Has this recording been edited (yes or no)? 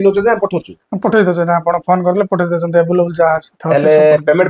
no